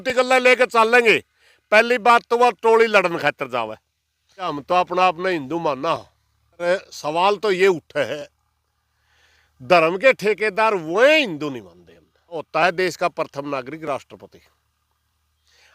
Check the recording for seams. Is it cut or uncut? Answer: cut